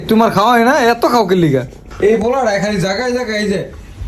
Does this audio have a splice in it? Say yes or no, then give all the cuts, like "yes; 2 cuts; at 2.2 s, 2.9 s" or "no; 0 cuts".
yes; 1 cut; at 1.8 s